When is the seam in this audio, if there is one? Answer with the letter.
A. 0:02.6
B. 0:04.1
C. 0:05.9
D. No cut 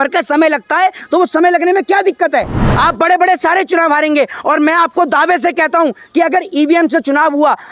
A